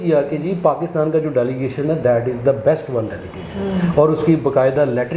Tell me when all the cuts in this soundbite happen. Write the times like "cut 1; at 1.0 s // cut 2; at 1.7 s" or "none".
none